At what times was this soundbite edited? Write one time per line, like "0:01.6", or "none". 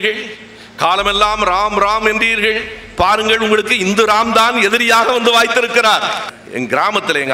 0:06.3